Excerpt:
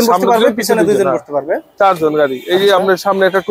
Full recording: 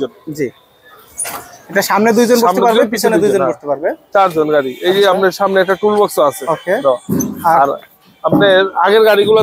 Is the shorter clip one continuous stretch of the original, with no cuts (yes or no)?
yes